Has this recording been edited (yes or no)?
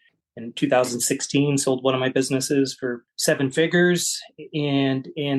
yes